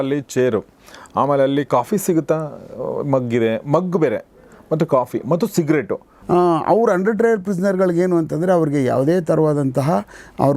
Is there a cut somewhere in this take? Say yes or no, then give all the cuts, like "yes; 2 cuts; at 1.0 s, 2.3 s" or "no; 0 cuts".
yes; 1 cut; at 6.2 s